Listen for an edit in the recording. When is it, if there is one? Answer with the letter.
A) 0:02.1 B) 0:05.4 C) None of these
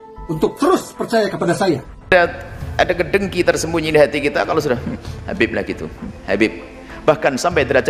A